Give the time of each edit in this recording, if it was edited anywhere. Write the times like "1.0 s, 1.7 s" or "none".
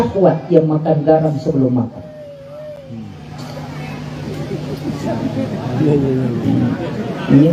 none